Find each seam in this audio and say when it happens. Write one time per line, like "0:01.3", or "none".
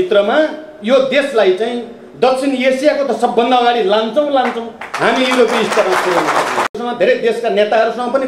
0:06.8